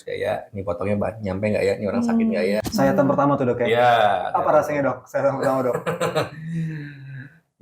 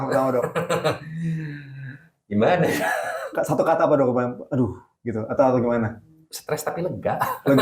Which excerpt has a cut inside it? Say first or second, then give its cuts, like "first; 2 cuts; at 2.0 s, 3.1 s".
first; 1 cut; at 2.7 s